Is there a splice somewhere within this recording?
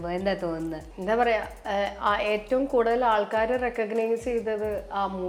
no; 0 cuts

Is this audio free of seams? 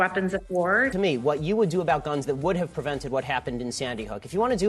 no; 1 cut; at 0.9 s

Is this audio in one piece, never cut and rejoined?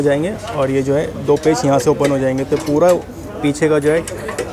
yes; 0 cuts

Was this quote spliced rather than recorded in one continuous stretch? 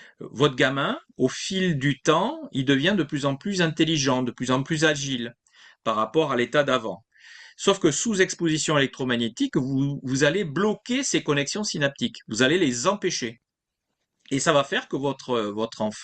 no; 0 cuts

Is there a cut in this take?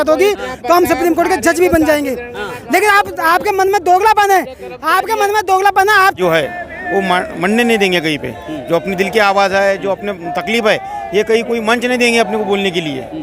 yes; 1 cut; at 6.2 s

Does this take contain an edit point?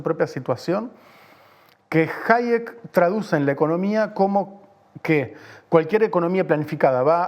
no; 0 cuts

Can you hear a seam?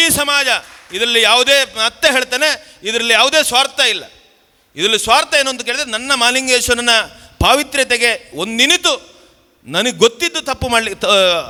no; 0 cuts

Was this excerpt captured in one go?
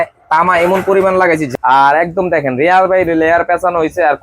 no; 1 cut; at 1.5 s

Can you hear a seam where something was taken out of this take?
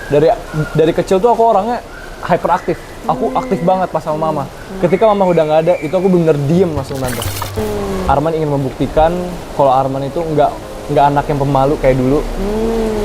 yes; 1 cut; at 7.6 s

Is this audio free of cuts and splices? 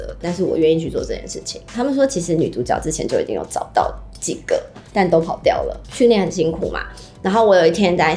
no; 2 cuts; at 1.7 s, 5.8 s

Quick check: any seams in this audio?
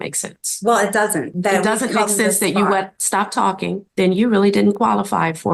yes; 2 cuts; at 1.3 s, 3.9 s

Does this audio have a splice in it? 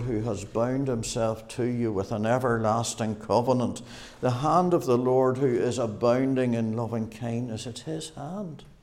no; 0 cuts

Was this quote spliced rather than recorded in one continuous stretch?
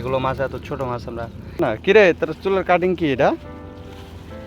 yes; 1 cut; at 1.6 s

